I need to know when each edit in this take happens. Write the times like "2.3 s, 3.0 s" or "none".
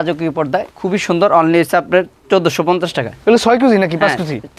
none